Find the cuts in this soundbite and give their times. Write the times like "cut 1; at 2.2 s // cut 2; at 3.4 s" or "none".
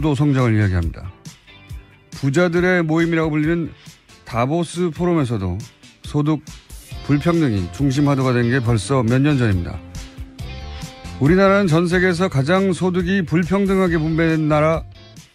none